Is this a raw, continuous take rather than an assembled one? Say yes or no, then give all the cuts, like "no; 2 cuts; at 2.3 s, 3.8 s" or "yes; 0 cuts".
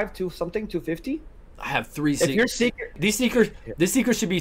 no; 1 cut; at 2.9 s